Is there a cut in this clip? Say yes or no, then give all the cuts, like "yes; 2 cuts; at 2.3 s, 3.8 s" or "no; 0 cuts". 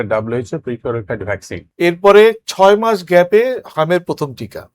yes; 1 cut; at 1.6 s